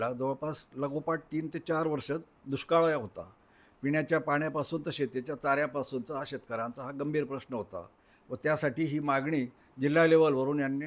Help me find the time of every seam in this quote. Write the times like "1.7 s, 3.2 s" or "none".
none